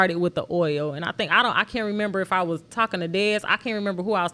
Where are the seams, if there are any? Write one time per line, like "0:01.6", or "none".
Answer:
none